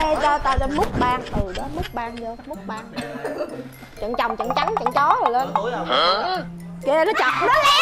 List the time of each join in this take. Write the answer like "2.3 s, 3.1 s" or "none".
2.8 s

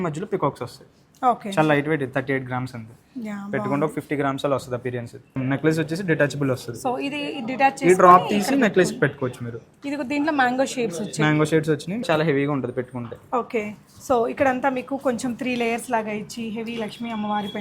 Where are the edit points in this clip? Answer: 5.4 s, 12.0 s

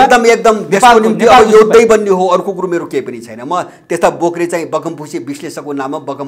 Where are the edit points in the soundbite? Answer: none

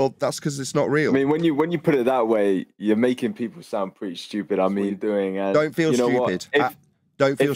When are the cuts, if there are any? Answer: 4.9 s

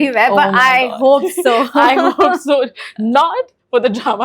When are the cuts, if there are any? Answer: none

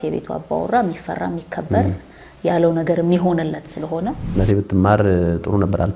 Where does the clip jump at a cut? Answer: 4.2 s

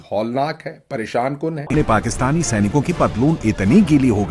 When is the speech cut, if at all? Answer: 1.7 s

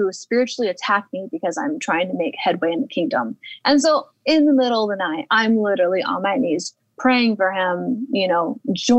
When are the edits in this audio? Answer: 3.5 s

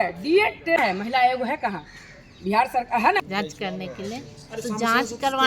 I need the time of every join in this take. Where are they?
1.0 s, 3.2 s

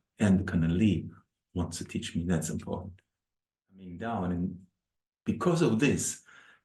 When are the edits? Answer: 3.9 s

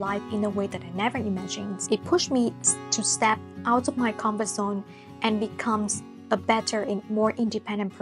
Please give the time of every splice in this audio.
none

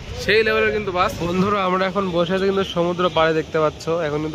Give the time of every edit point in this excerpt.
1.2 s

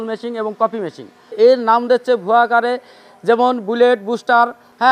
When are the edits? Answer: none

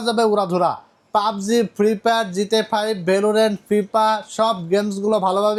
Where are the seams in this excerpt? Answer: none

